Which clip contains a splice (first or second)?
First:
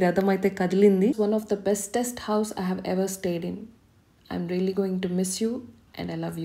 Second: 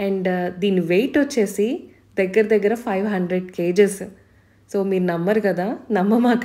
first